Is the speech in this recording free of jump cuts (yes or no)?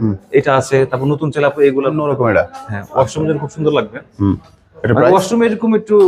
no